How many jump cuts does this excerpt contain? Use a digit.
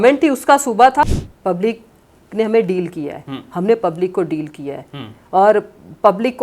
1